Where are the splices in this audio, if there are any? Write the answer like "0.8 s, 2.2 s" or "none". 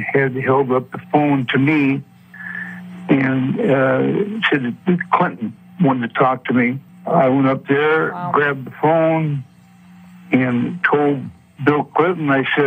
6.9 s